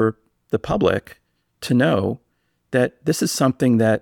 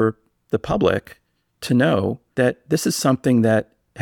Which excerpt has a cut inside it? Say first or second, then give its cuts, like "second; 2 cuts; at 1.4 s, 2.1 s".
second; 1 cut; at 2.2 s